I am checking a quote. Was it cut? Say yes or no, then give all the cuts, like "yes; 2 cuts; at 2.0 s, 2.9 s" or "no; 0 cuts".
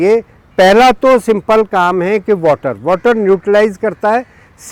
no; 0 cuts